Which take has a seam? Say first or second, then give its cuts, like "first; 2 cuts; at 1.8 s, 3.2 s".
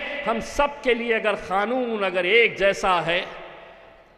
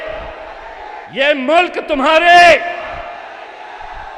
second; 1 cut; at 1.0 s